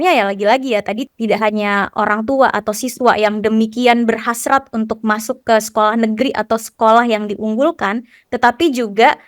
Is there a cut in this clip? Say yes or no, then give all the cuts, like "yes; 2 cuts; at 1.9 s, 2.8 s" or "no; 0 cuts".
yes; 1 cut; at 1.1 s